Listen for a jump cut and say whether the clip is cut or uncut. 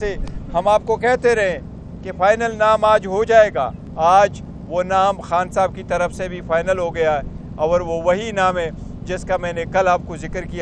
cut